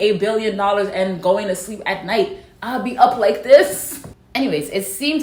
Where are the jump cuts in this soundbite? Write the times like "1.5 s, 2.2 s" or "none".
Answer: none